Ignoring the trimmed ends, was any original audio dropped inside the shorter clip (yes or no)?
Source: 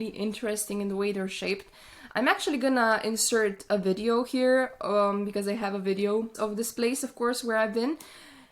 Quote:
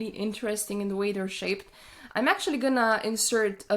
no